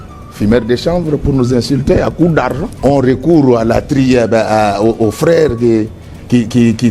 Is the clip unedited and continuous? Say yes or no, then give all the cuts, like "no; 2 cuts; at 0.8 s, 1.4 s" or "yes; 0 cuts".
no; 1 cut; at 2.7 s